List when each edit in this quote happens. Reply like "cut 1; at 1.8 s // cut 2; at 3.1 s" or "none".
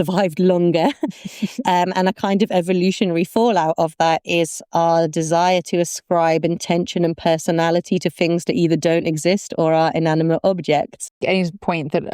cut 1; at 11.2 s